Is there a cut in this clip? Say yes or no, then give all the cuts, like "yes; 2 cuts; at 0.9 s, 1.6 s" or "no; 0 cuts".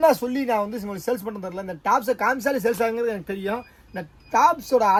no; 0 cuts